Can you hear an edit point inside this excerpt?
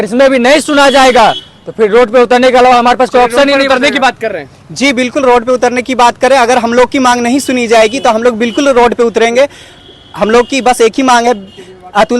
no; 0 cuts

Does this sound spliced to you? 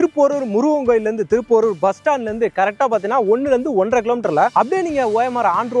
no; 0 cuts

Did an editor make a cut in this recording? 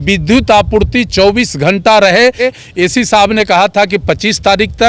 yes; 1 cut; at 2.5 s

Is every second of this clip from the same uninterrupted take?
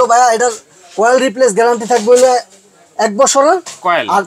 yes; 0 cuts

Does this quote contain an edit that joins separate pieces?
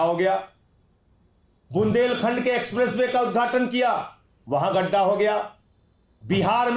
no; 0 cuts

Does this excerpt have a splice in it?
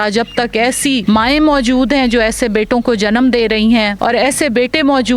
yes; 2 cuts; at 1.0 s, 3.9 s

